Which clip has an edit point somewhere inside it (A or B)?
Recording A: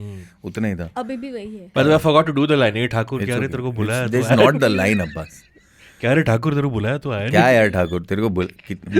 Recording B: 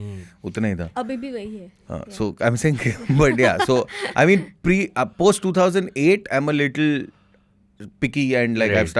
A